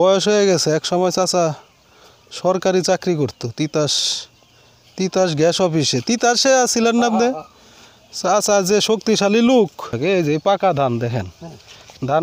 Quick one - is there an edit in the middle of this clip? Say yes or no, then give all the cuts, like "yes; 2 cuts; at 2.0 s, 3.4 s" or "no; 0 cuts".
yes; 1 cut; at 9.9 s